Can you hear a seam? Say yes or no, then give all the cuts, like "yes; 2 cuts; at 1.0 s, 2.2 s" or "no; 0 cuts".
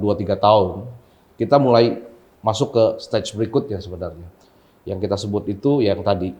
no; 0 cuts